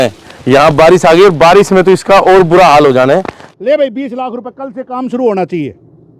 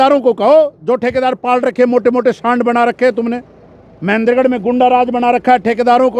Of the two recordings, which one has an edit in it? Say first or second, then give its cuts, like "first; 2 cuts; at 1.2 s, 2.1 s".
first; 1 cut; at 3.4 s